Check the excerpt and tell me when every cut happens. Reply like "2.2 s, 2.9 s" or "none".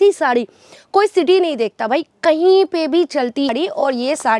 3.5 s